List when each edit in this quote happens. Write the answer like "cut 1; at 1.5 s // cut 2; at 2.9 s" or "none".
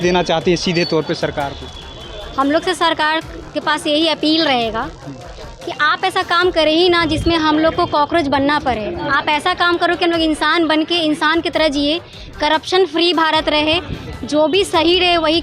none